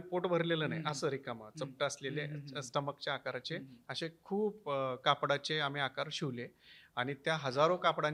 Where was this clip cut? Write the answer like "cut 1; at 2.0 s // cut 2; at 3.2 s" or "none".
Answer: none